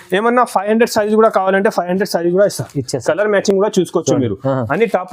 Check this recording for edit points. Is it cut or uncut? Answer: uncut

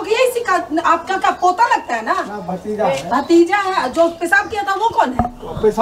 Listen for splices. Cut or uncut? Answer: uncut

